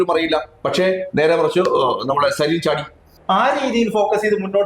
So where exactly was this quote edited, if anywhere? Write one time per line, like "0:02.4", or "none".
0:03.1